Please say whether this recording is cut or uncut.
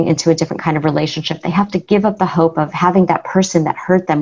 cut